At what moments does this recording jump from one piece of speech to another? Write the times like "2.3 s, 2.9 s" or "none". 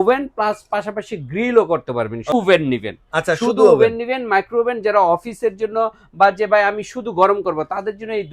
2.3 s